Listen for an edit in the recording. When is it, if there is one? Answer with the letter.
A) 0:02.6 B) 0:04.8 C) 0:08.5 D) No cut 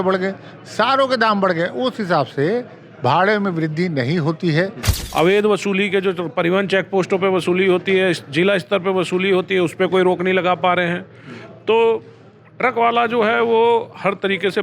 B